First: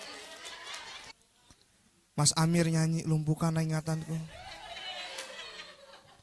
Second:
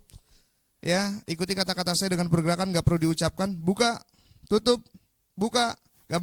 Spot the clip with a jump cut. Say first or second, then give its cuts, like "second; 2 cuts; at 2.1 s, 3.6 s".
first; 1 cut; at 1.1 s